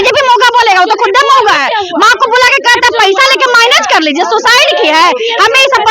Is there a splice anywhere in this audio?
no; 0 cuts

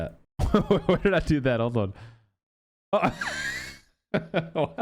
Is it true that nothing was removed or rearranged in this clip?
yes; 0 cuts

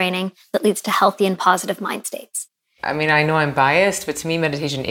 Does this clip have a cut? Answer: yes; 1 cut; at 2.7 s

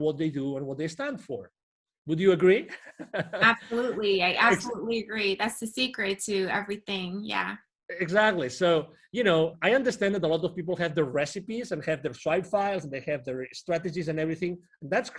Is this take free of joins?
yes; 0 cuts

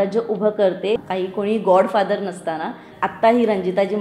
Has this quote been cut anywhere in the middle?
yes; 2 cuts; at 1.0 s, 2.9 s

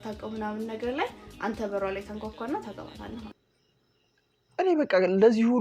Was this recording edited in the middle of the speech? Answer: yes; 1 cut; at 3.3 s

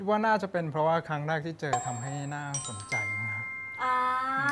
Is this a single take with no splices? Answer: yes; 0 cuts

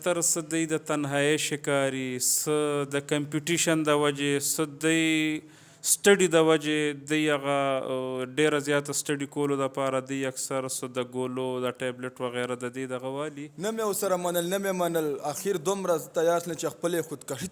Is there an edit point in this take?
yes; 1 cut; at 13.4 s

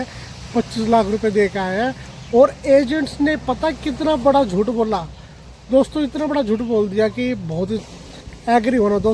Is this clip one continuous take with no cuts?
no; 1 cut; at 7.8 s

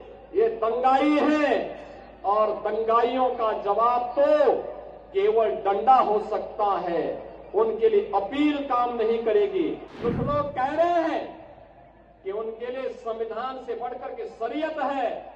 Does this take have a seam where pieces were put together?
yes; 1 cut; at 9.9 s

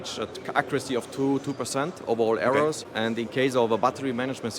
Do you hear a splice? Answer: yes; 1 cut; at 2.9 s

